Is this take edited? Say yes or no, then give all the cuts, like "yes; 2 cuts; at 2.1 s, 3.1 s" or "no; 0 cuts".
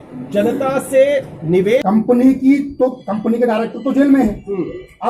yes; 1 cut; at 1.8 s